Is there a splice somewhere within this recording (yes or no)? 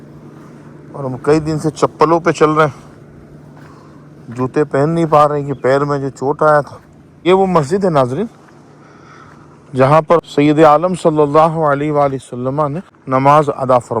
yes